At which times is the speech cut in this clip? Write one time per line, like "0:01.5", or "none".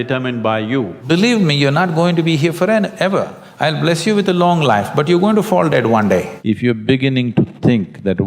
0:01.0
0:06.3